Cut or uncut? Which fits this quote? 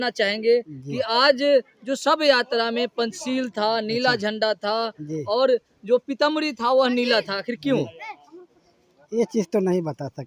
uncut